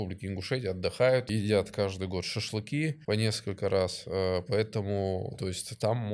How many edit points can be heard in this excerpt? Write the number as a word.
two